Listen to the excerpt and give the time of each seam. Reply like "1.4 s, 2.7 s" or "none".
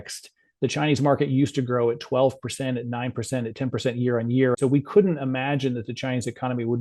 4.6 s